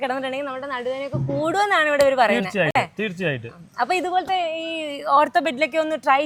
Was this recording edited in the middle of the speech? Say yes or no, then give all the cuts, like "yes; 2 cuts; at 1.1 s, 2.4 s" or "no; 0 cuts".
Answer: no; 0 cuts